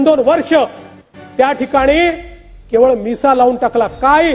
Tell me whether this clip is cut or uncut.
uncut